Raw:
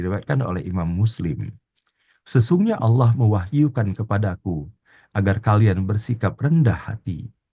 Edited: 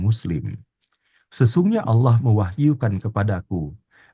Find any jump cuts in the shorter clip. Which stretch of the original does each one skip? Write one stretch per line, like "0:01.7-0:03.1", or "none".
none

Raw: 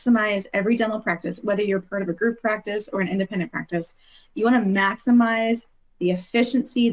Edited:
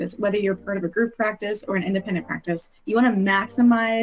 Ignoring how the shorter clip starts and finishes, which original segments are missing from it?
0:04.0-0:04.2

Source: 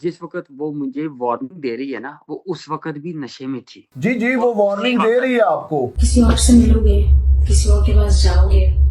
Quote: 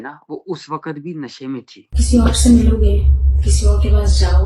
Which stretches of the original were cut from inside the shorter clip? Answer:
0:03.9-0:05.9

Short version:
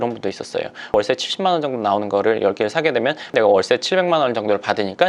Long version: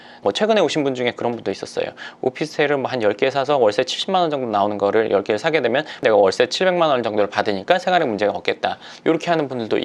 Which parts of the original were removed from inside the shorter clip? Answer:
0:02.2-0:03.6

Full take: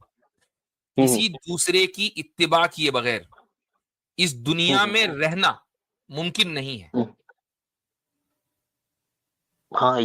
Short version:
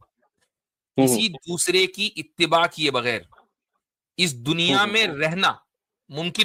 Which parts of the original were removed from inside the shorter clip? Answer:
none

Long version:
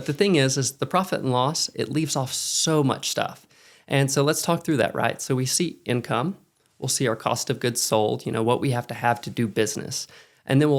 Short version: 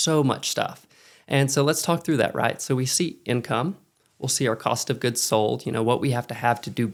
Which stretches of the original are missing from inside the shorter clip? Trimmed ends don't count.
none

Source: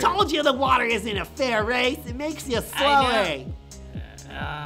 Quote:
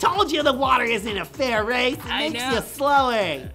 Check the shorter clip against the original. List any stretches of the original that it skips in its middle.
none

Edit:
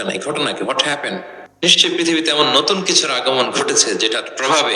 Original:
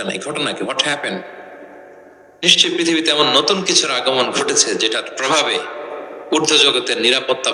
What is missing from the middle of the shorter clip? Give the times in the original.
0:01.4-0:02.2

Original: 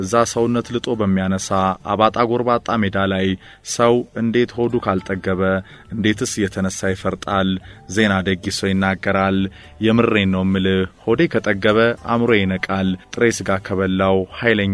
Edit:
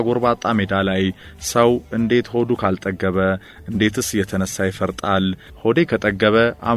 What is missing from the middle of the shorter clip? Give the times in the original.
0:07.8-0:10.9

